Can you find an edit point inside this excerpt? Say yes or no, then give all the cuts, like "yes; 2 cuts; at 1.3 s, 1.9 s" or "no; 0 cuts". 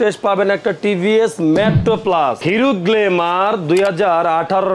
yes; 1 cut; at 2.4 s